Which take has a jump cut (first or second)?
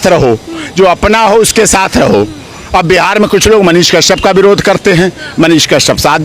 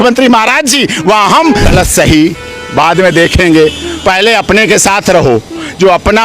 second